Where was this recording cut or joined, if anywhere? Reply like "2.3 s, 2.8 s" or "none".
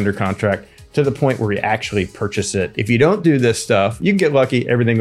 2.8 s, 4.0 s